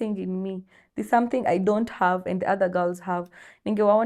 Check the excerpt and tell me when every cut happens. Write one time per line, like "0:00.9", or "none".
none